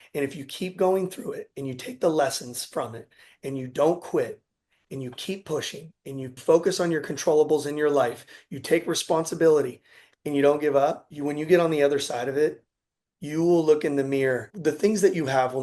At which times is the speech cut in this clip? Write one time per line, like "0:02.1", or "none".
0:06.4
0:11.1
0:14.5